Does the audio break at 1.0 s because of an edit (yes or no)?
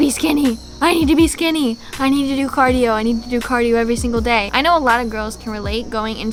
no